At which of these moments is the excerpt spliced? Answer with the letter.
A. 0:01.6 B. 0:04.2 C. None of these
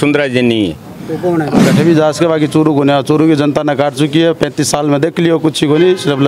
A